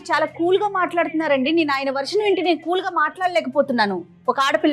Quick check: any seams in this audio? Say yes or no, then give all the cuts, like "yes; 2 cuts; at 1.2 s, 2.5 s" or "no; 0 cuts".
no; 0 cuts